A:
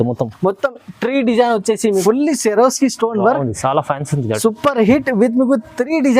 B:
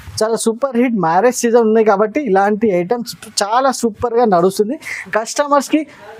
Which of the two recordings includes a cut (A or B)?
A